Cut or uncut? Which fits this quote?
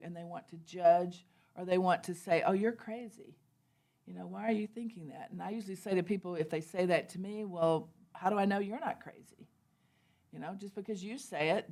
uncut